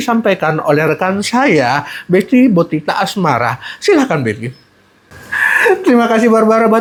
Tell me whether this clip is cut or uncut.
uncut